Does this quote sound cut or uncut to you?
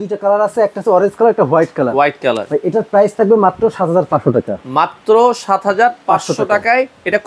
uncut